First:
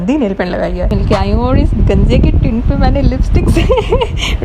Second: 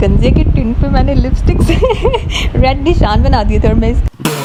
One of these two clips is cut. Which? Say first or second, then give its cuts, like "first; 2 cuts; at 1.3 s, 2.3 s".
first; 1 cut; at 0.9 s